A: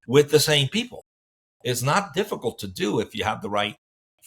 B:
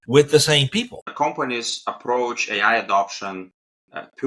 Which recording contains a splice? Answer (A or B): B